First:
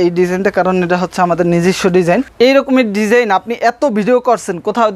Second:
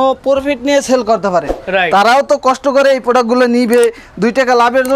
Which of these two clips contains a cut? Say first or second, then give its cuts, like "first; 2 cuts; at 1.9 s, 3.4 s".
first; 1 cut; at 2.3 s